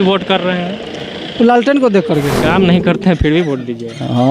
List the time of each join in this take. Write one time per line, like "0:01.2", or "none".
0:02.4